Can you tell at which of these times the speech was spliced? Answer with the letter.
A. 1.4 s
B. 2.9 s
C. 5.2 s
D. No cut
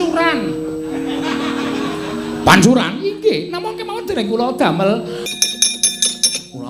C